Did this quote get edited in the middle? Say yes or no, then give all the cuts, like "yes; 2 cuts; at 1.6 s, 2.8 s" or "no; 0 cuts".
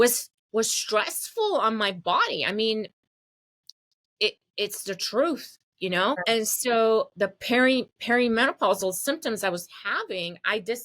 yes; 1 cut; at 6.2 s